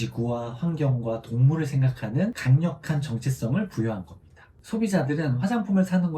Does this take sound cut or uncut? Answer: cut